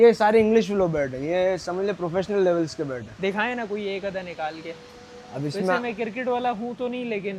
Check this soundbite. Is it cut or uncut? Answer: uncut